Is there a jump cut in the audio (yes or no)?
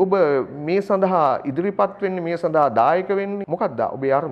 yes